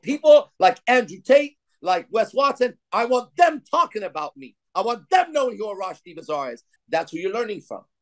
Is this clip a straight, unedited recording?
yes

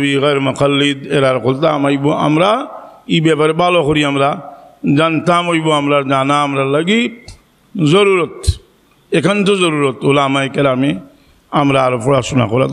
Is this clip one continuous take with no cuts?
yes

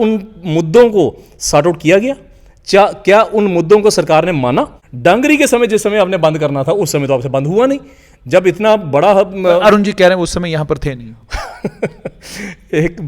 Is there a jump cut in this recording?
yes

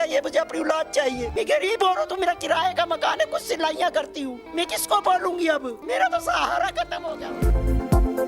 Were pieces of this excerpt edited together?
yes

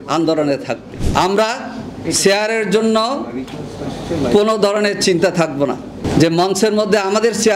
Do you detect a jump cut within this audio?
yes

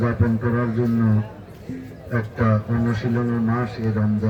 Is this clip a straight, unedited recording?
yes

